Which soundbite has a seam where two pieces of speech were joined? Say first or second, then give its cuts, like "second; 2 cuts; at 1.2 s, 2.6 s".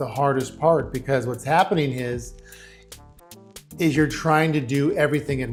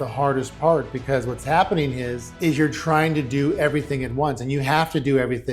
second; 1 cut; at 2.3 s